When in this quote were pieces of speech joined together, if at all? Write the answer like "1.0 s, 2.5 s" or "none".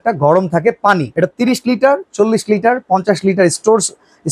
1.1 s